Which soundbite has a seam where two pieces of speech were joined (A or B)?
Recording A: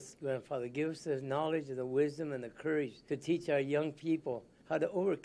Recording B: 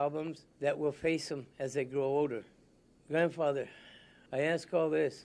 B